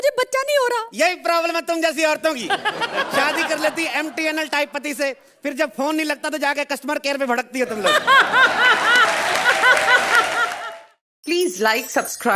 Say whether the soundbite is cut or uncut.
cut